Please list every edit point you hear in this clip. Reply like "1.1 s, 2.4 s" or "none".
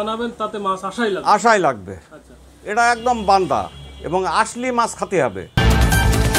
5.5 s